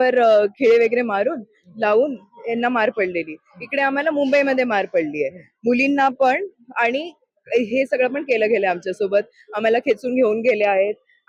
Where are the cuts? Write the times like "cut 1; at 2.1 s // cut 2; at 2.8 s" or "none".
none